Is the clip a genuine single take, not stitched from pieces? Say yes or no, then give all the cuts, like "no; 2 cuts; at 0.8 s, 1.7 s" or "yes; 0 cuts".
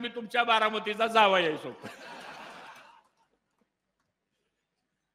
yes; 0 cuts